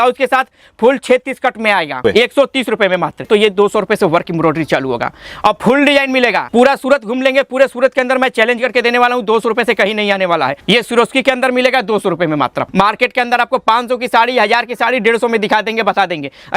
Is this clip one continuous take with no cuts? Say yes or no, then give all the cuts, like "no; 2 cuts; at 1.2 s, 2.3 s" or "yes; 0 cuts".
no; 5 cuts; at 2.0 s, 3.3 s, 6.4 s, 10.6 s, 12.6 s